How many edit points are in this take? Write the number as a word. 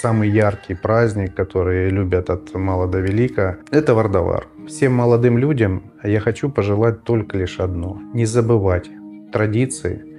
two